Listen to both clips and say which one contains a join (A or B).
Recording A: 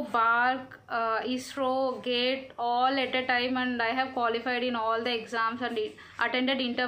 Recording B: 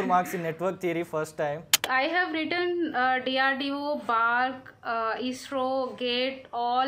B